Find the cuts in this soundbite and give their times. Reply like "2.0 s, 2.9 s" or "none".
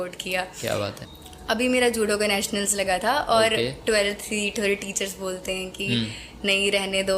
1.0 s